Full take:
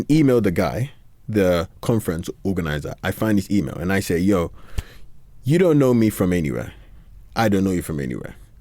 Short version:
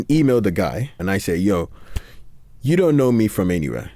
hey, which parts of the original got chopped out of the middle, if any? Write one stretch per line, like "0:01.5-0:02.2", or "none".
0:00.9-0:03.8